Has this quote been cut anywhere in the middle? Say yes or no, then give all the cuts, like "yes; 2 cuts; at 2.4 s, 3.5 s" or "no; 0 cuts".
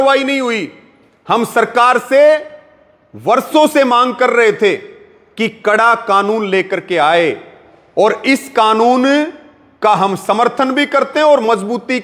no; 0 cuts